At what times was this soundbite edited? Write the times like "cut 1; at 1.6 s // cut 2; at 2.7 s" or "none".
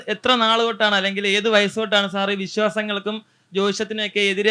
none